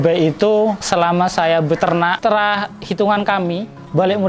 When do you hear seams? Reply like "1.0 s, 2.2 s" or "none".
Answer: 0.8 s, 2.2 s